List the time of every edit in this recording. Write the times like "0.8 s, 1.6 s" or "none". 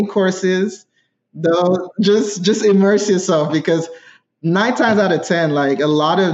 none